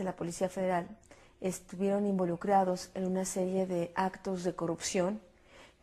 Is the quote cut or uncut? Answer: cut